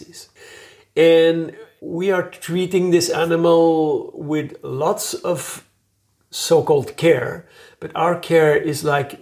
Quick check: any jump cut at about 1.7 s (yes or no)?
no